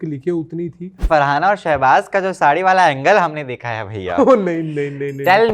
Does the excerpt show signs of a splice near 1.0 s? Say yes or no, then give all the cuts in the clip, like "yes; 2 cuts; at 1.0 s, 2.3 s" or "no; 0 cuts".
yes; 1 cut; at 1.0 s